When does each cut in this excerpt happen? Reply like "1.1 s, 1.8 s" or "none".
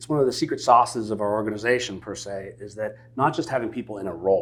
none

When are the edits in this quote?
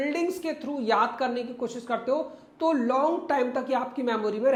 none

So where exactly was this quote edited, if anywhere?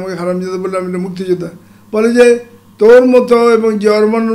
none

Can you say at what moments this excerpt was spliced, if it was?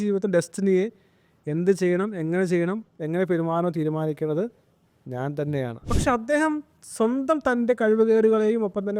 5.9 s

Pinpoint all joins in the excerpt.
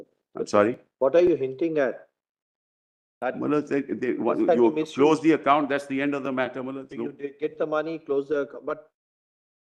none

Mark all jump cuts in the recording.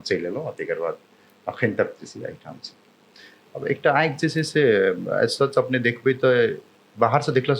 3.0 s

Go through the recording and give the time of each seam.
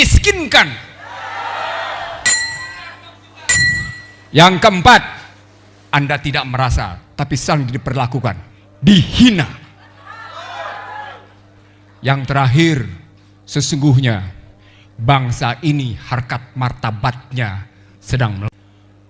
none

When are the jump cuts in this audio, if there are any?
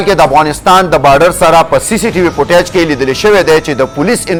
none

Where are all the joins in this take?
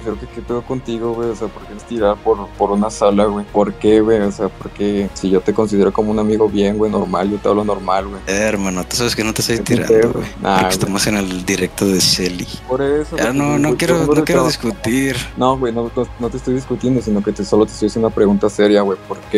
3.5 s, 5.1 s, 12.6 s, 15.3 s

